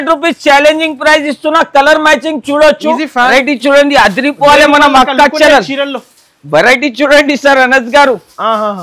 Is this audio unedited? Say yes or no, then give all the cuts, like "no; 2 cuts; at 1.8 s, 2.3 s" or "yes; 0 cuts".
no; 1 cut; at 3.2 s